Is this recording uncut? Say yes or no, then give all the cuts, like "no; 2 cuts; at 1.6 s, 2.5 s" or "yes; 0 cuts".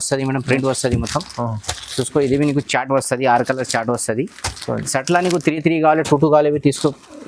yes; 0 cuts